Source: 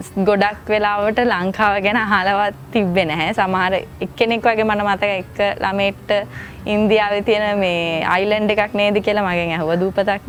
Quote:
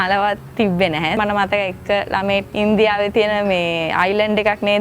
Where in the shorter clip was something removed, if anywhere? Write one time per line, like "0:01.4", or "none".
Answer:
0:01.2
0:02.5

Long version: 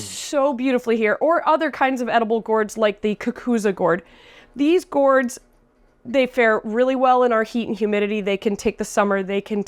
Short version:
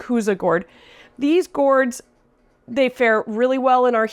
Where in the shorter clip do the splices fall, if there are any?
none

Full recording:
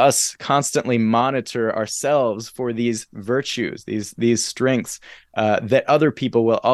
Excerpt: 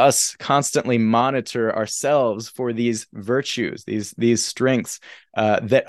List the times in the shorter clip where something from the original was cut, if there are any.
none

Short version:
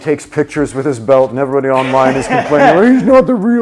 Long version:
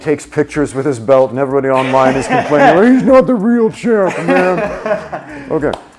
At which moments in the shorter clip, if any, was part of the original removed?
none

